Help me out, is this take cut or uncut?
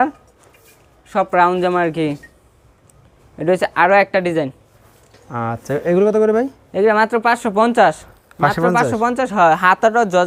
uncut